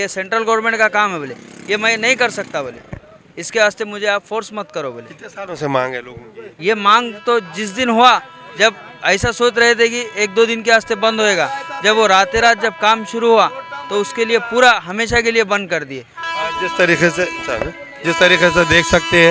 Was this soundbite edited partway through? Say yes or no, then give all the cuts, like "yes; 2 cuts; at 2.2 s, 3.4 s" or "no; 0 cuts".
no; 0 cuts